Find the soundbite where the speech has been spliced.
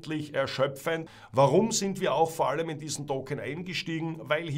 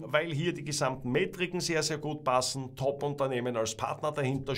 first; 1 cut; at 1.1 s

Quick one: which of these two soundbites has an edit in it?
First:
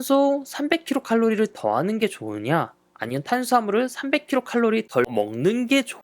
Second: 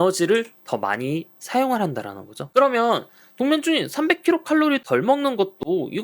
second; 1 cut; at 2.4 s

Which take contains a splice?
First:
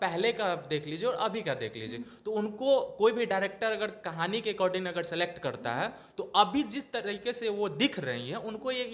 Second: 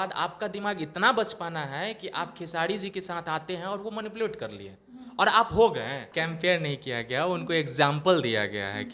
second; 1 cut; at 6.1 s

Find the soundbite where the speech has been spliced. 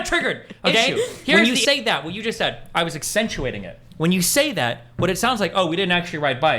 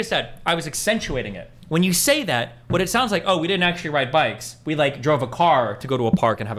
first; 1 cut; at 1.3 s

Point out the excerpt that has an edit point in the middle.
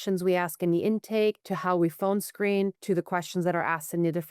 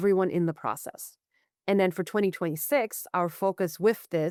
first; 2 cuts; at 1.5 s, 2.8 s

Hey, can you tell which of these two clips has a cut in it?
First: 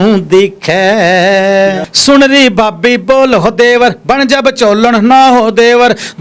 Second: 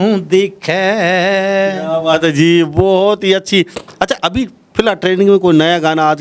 first; 1 cut; at 1.8 s

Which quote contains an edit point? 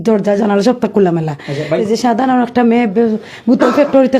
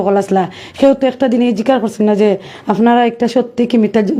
first; 1 cut; at 1.8 s

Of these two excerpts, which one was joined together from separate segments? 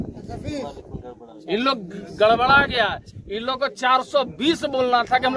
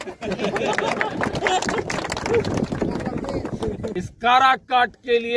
second; 1 cut; at 3.9 s

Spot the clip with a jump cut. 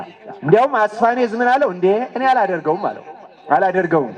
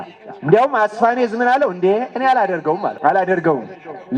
second; 1 cut; at 2.9 s

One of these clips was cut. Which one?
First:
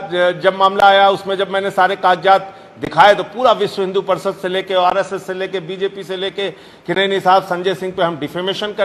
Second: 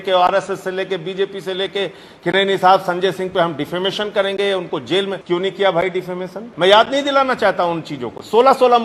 second; 2 cuts; at 5.2 s, 6.4 s

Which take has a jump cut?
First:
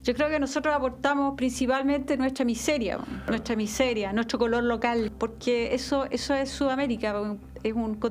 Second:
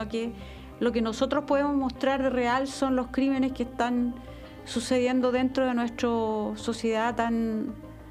first; 2 cuts; at 3.2 s, 5.1 s

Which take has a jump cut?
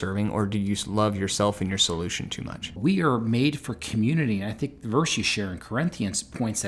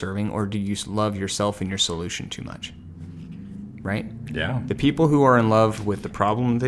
first; 1 cut; at 2.8 s

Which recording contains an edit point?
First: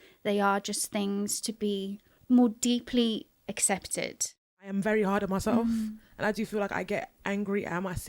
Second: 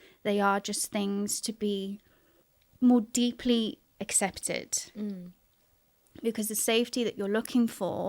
first; 2 cuts; at 2.1 s, 4.7 s

